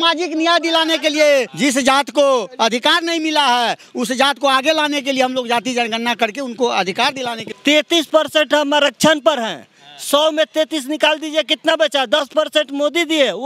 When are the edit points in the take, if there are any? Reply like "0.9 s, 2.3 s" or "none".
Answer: 1.5 s, 7.4 s